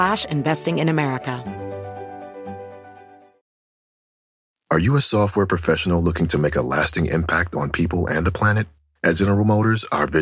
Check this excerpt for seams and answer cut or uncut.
cut